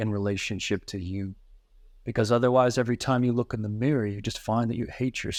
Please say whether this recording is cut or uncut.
uncut